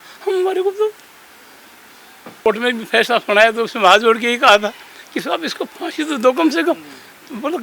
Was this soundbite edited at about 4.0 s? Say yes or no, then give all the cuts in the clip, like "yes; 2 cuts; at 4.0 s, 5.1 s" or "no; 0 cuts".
no; 1 cut; at 2.5 s